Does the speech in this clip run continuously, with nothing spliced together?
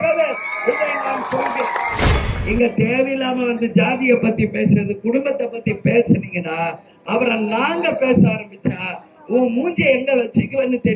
no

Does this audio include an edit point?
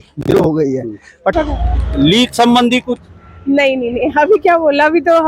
yes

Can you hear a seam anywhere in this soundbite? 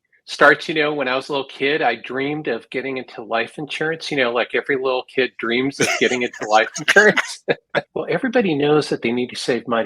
yes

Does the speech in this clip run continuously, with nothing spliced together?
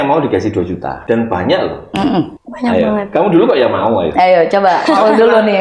no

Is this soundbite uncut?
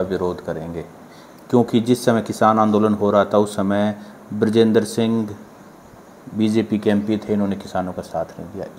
yes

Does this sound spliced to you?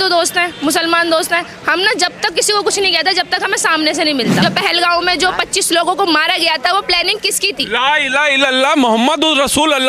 yes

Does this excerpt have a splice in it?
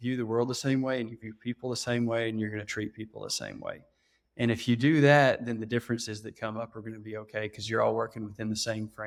no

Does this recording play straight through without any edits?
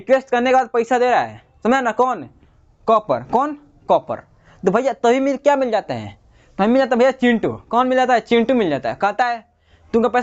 yes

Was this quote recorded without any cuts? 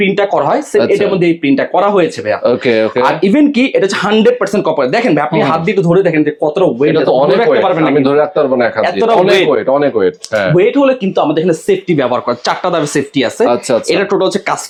yes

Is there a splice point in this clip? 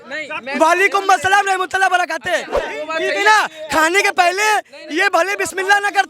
yes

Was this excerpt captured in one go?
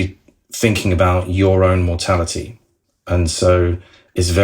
no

